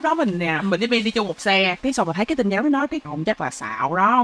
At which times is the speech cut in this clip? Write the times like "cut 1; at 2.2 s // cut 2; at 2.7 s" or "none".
none